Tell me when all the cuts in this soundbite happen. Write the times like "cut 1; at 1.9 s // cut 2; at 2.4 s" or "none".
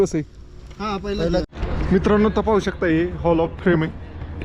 cut 1; at 1.4 s